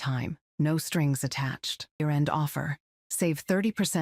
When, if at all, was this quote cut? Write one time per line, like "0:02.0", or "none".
0:02.0